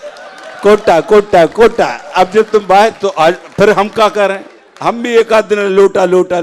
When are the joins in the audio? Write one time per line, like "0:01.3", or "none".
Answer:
none